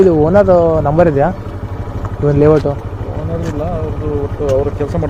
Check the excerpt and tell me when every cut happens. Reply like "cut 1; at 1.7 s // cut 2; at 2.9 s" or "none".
none